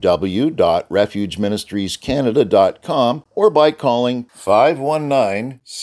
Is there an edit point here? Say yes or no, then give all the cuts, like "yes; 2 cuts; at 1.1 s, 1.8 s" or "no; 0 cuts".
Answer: yes; 1 cut; at 3.2 s